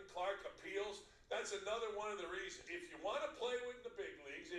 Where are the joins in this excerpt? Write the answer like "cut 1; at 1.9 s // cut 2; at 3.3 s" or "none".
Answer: cut 1; at 2.7 s

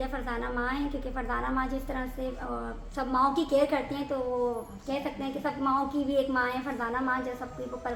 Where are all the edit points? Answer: none

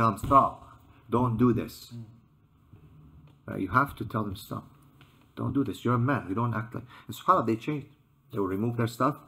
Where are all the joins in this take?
none

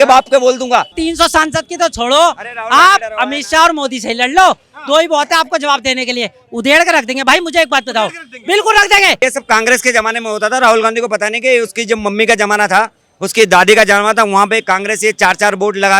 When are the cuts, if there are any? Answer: cut 1; at 0.9 s // cut 2; at 9.2 s

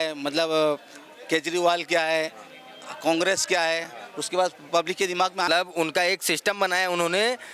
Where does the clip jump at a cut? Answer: cut 1; at 5.5 s

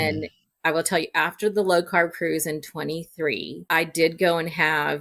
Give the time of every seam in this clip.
cut 1; at 3.6 s

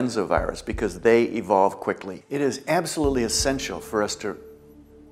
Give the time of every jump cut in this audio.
cut 1; at 2.2 s

